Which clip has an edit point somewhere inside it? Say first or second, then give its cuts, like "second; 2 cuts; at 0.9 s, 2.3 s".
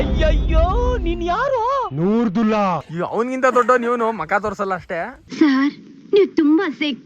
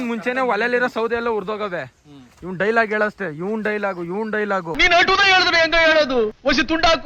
first; 1 cut; at 2.9 s